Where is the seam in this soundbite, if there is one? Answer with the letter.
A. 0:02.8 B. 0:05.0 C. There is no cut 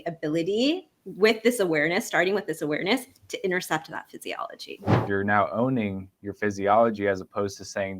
B